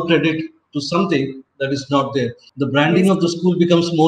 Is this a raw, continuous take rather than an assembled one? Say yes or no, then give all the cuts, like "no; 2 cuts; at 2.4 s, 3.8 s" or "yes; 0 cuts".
no; 1 cut; at 2.4 s